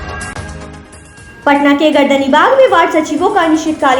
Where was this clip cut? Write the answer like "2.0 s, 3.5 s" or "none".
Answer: 1.0 s